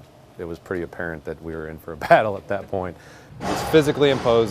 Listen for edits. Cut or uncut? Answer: cut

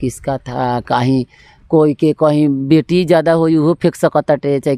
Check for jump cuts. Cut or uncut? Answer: uncut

